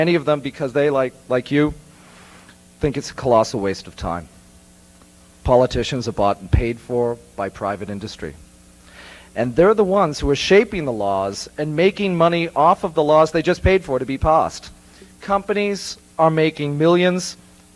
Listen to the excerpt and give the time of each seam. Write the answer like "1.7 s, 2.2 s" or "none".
11.6 s